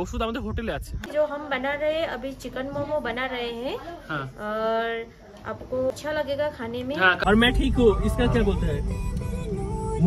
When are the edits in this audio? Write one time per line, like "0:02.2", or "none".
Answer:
0:01.1
0:05.9
0:07.2